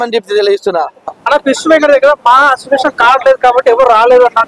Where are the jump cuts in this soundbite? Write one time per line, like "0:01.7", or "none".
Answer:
0:01.2